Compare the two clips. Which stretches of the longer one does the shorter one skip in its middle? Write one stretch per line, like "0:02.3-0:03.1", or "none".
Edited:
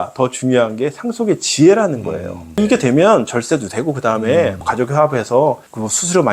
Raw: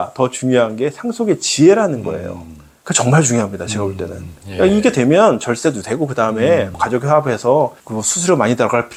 0:02.6-0:04.7